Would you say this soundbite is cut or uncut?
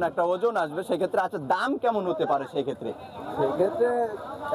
uncut